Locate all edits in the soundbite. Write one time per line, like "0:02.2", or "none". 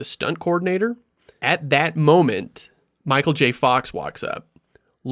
0:01.3

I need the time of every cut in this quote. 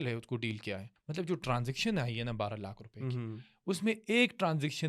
0:00.9

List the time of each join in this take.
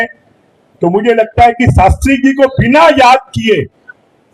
none

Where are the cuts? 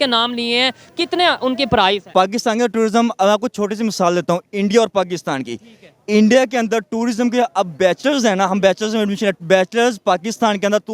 0:02.1

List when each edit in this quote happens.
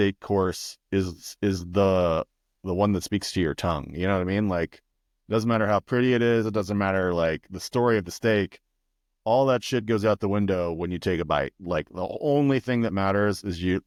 none

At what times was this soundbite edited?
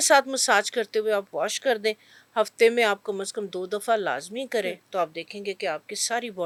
none

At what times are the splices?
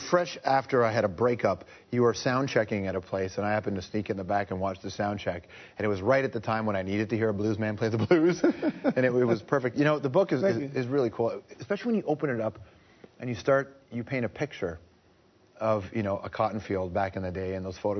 0:17.0

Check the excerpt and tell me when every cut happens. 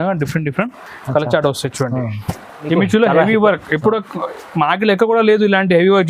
0:02.6

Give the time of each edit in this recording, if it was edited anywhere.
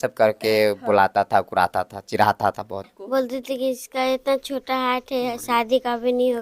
0:02.9

